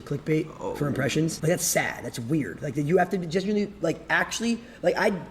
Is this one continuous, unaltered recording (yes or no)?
no